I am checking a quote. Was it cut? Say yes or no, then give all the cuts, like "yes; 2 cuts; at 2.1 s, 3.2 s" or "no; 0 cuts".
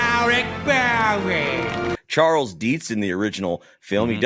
yes; 1 cut; at 1.9 s